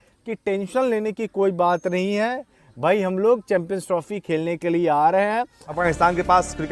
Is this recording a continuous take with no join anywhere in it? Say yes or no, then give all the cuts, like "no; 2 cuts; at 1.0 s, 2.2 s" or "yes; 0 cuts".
no; 1 cut; at 5.8 s